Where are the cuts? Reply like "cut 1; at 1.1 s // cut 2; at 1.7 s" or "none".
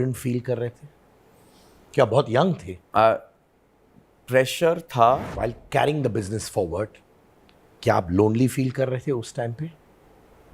cut 1; at 5.3 s